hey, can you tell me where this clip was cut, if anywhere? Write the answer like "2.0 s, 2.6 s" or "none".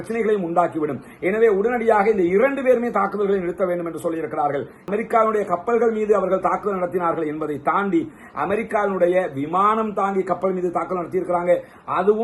4.8 s